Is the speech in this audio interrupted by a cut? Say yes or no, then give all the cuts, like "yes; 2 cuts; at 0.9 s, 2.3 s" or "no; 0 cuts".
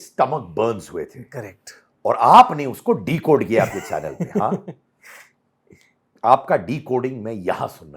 no; 0 cuts